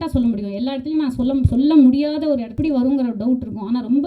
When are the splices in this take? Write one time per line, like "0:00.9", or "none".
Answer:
0:02.5

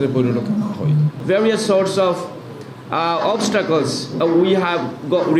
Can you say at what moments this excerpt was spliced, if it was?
0:01.2
0:04.1

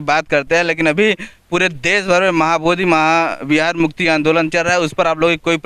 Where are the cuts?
none

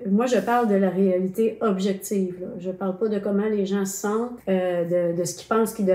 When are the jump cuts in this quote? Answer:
0:04.3

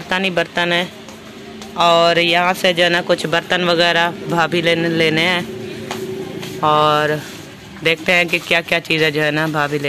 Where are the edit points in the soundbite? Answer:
none

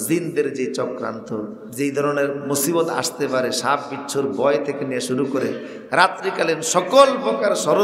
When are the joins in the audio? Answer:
0:01.6

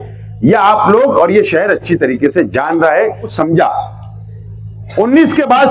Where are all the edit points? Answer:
0:03.3

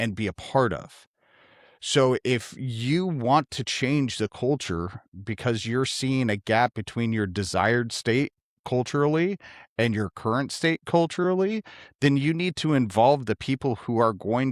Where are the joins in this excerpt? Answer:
none

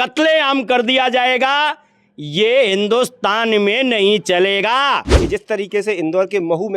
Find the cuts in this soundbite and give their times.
0:05.1

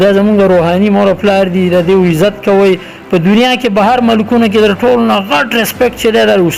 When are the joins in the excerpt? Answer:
none

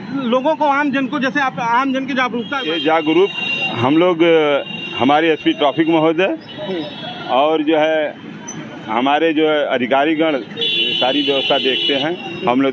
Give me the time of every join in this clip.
0:02.6

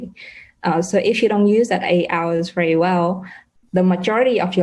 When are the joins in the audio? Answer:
0:03.5

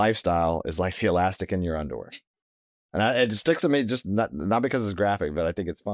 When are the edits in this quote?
none

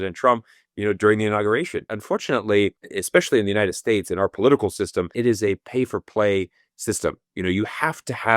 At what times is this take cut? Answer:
0:01.9
0:02.9
0:05.1

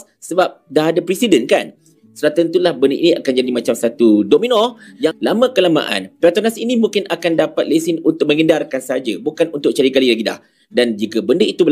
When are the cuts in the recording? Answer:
0:01.9
0:05.2

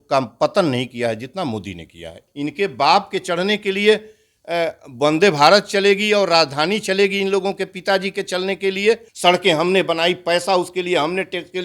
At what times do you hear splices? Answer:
0:02.2
0:09.1

